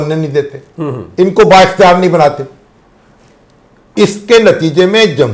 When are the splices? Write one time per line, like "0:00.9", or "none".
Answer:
none